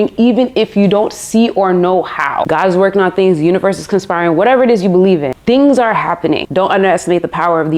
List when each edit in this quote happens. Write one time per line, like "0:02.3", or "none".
0:02.4
0:05.3
0:06.5